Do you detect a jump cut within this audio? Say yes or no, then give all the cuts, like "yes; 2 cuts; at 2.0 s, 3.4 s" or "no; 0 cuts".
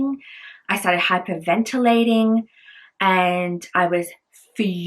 no; 0 cuts